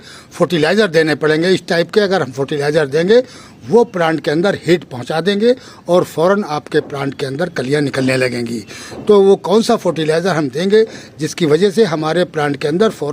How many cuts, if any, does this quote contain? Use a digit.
0